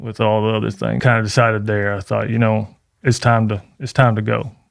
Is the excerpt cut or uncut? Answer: cut